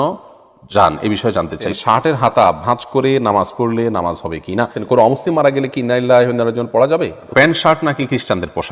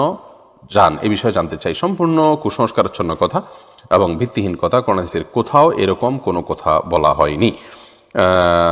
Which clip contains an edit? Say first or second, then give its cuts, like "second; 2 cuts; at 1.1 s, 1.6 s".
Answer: first; 3 cuts; at 1.7 s, 4.8 s, 7.2 s